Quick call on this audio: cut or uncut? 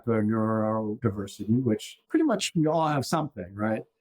cut